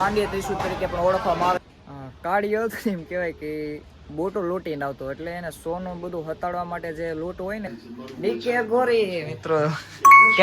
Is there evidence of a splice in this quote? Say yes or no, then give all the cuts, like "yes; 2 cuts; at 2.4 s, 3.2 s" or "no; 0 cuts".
yes; 2 cuts; at 1.6 s, 7.7 s